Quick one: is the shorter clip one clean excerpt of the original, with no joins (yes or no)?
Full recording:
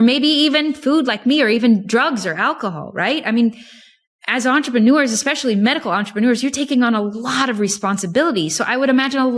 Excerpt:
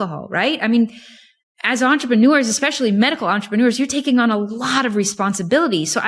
yes